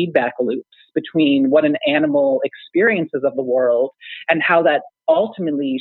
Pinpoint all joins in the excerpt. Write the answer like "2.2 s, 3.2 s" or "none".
none

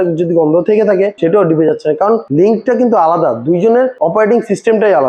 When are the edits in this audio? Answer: 1.1 s, 2.3 s, 3.9 s

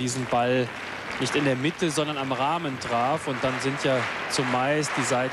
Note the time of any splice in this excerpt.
2.3 s

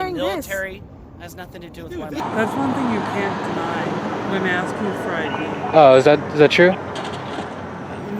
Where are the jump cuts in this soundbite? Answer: 2.1 s

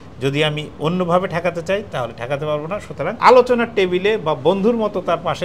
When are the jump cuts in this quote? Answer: 3.2 s

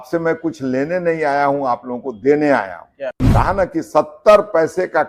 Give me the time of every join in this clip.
3.2 s

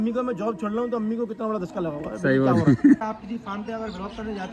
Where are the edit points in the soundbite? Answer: 3.0 s

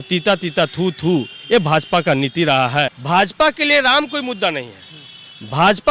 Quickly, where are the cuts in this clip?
3.0 s

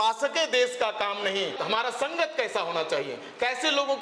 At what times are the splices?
1.6 s

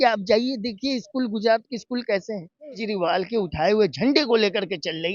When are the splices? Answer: 2.8 s

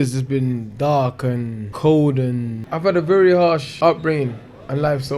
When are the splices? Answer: 1.6 s, 2.7 s, 3.7 s

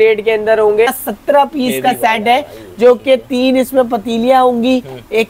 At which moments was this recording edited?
1.0 s

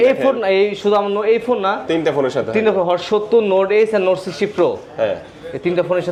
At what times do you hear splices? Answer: none

